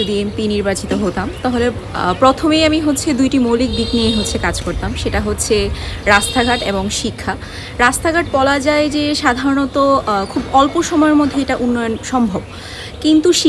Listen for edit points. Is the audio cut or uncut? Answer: uncut